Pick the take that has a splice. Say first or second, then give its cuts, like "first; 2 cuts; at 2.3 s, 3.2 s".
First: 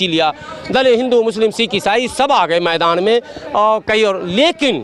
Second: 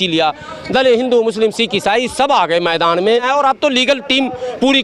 second; 1 cut; at 3.2 s